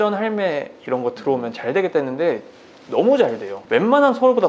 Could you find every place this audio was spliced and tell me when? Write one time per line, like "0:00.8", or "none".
0:03.5